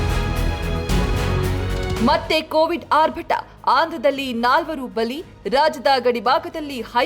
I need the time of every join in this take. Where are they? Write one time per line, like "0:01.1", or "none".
0:01.8